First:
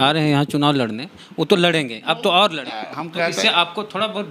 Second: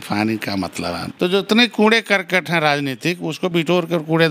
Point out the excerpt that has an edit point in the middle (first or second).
second